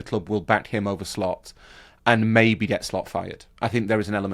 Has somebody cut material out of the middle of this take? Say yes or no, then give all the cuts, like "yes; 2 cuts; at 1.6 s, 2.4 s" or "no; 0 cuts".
no; 0 cuts